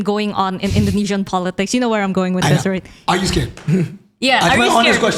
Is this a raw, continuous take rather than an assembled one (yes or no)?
yes